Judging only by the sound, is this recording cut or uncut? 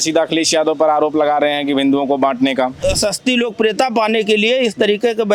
cut